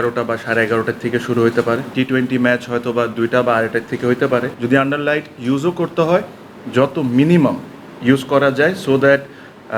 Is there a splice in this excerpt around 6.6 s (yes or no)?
no